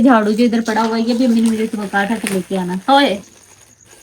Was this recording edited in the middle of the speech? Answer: no; 0 cuts

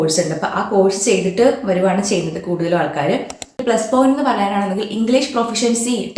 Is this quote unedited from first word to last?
no; 1 cut; at 3.6 s

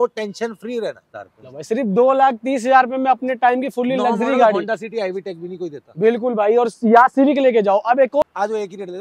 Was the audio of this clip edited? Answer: yes; 2 cuts; at 1.1 s, 8.2 s

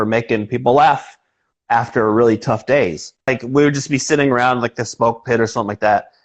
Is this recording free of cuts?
no; 1 cut; at 3.3 s

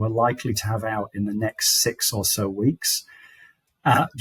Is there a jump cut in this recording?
no; 0 cuts

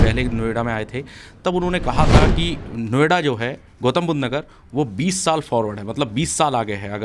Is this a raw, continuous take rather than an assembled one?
yes; 0 cuts

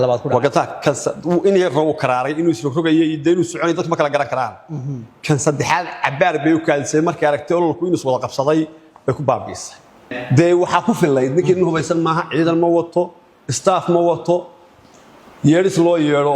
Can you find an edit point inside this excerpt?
yes; 1 cut; at 10.2 s

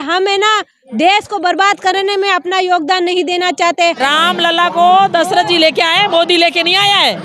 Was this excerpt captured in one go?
no; 1 cut; at 4.0 s

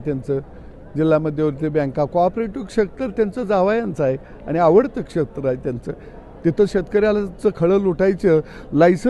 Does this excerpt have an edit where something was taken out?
no; 0 cuts

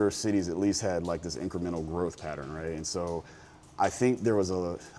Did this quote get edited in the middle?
no; 0 cuts

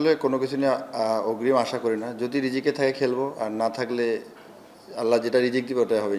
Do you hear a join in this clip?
no; 0 cuts

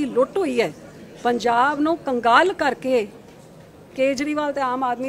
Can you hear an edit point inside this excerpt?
no; 0 cuts

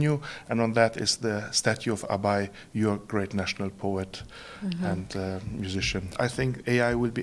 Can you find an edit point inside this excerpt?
yes; 1 cut; at 6.1 s

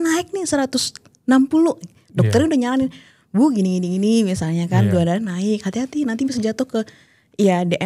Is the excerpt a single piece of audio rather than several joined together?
yes; 0 cuts

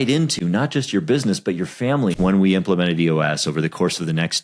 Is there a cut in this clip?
yes; 1 cut; at 2.2 s

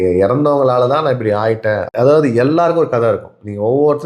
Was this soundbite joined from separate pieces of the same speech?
yes; 1 cut; at 1.9 s

